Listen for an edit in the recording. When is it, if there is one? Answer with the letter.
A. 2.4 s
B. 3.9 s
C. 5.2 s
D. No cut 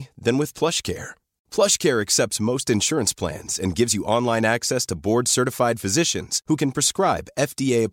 D